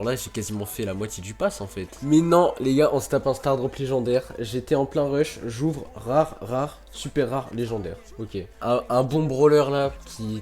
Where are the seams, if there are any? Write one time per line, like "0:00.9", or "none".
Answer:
0:01.9
0:08.5